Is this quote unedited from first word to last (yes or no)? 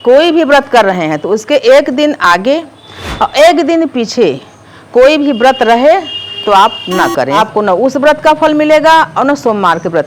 no